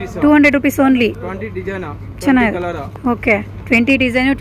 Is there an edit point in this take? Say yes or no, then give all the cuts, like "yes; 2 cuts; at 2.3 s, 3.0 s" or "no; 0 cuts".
no; 0 cuts